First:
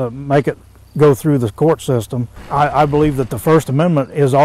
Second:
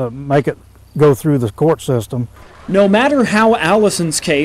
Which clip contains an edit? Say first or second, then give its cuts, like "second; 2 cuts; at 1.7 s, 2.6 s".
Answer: first; 1 cut; at 2.4 s